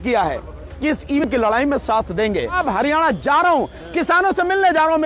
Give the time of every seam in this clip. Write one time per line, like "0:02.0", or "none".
0:01.2
0:02.6

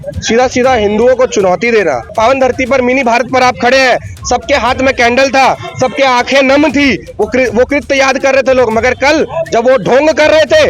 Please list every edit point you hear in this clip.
0:02.1

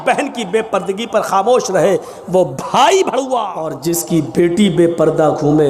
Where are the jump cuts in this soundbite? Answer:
0:03.8

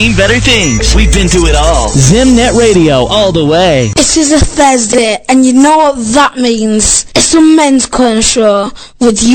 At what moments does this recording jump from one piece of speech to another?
none

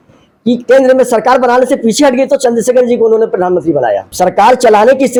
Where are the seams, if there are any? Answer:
none

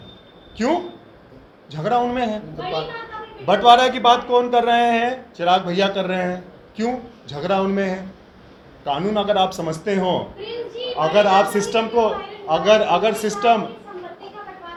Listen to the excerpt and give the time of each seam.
none

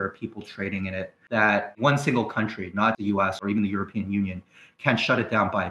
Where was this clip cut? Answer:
0:01.7
0:03.1

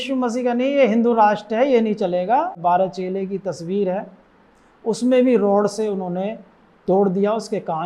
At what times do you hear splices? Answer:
0:02.6

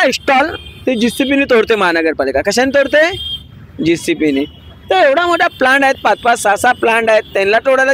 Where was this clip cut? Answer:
none

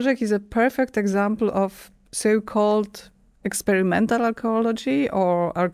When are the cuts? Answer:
none

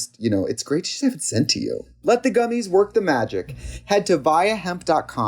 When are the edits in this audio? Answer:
0:01.9

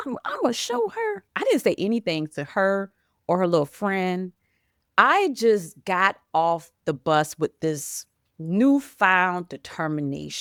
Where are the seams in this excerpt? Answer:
none

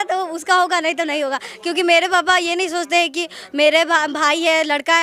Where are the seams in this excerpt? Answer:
none

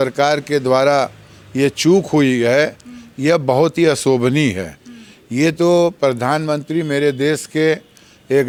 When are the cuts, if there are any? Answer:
none

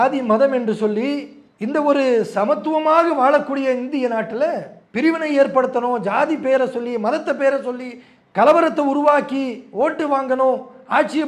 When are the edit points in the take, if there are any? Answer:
none

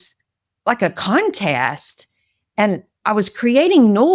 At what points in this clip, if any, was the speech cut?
0:02.9

